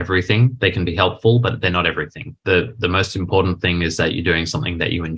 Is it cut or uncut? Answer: uncut